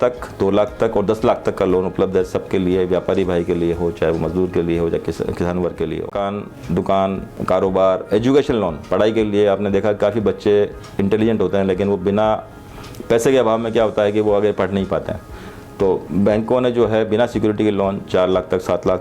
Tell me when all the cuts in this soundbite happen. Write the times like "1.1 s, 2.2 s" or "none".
6.2 s

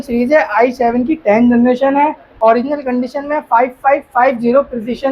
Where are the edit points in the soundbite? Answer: 2.3 s

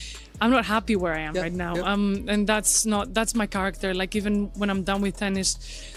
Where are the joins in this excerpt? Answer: none

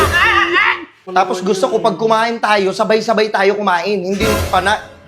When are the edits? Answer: 0.9 s

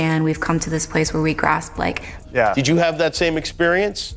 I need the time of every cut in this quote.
2.1 s

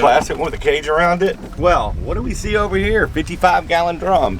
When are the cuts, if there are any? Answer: 1.5 s

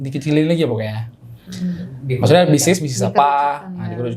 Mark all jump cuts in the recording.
none

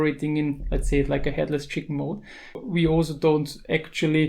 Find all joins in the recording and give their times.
2.6 s

